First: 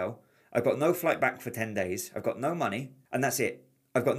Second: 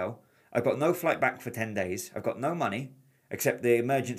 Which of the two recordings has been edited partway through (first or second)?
first